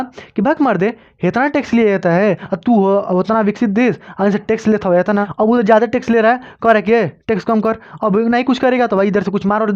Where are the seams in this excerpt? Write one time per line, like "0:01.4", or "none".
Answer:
0:02.4
0:05.3